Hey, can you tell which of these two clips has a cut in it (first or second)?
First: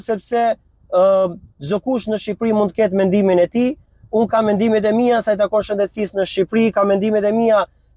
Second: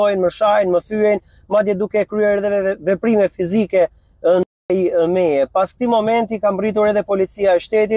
second